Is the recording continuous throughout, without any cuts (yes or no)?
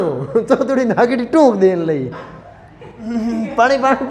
no